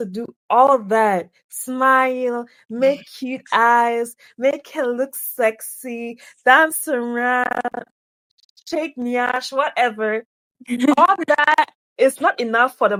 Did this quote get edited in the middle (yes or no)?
no